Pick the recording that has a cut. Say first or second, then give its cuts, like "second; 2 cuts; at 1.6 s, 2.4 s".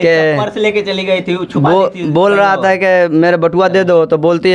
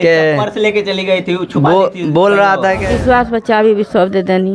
second; 1 cut; at 2.8 s